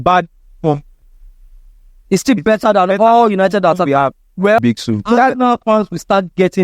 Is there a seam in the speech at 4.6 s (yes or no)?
yes